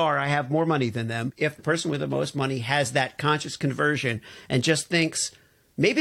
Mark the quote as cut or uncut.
cut